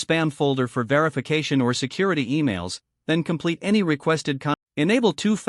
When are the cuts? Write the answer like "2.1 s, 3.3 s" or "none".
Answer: 4.6 s